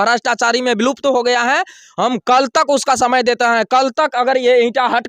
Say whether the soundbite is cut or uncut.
uncut